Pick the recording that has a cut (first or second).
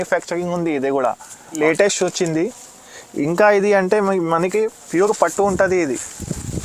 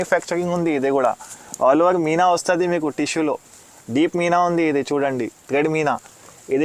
first